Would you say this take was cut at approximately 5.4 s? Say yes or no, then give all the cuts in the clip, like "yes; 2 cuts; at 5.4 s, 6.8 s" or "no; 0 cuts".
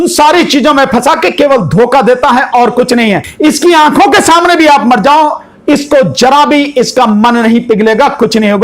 no; 1 cut; at 3.3 s